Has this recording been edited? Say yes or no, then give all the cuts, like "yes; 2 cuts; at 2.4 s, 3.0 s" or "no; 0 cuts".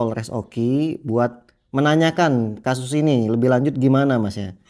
no; 0 cuts